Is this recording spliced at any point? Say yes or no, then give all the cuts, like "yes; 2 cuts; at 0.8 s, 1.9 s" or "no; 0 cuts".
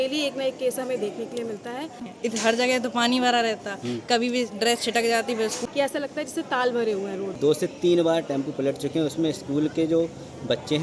yes; 3 cuts; at 2.0 s, 5.6 s, 7.3 s